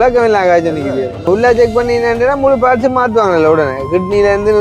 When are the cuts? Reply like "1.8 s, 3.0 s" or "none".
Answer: 1.3 s

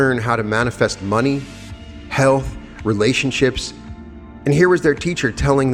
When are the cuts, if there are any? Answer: none

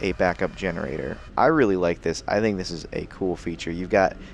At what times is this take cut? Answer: 1.2 s

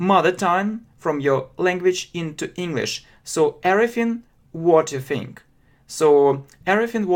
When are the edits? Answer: none

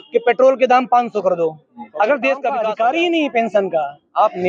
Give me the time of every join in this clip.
2.6 s

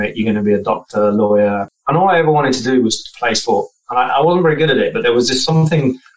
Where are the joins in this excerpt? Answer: 1.7 s

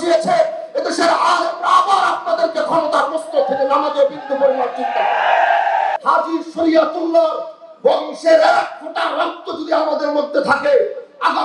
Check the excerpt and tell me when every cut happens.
5.9 s

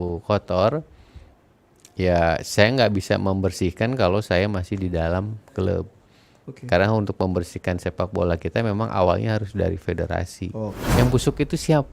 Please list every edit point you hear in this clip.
10.8 s

